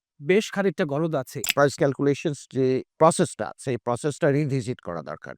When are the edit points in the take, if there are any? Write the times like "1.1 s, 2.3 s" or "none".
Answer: 1.8 s, 2.9 s